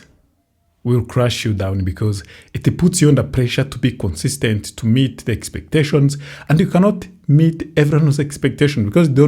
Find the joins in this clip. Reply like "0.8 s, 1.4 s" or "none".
none